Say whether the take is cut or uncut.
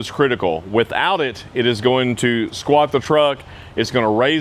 uncut